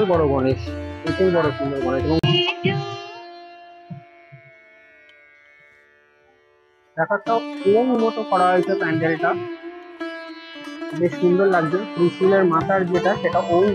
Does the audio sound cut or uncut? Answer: cut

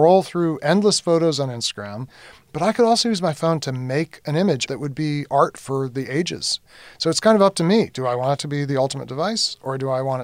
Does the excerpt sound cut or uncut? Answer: cut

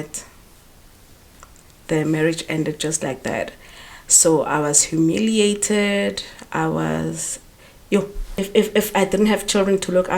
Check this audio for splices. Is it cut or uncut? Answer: cut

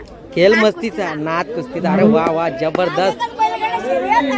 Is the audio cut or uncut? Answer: uncut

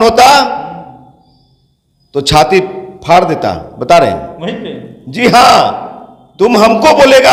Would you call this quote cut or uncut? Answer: uncut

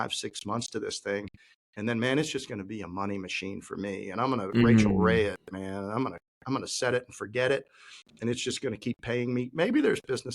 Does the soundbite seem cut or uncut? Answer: uncut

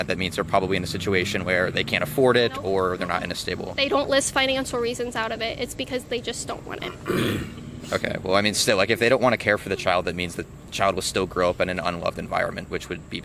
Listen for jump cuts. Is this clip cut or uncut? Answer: cut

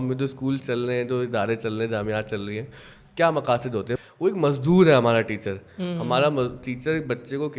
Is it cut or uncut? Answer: cut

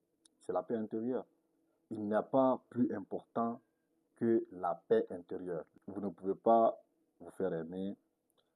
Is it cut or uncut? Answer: cut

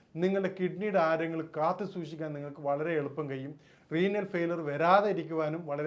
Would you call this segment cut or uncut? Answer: uncut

